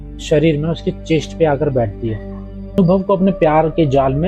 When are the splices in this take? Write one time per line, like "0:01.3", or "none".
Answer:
0:02.7